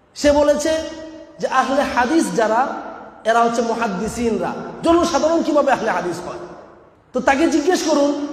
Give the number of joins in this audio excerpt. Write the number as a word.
one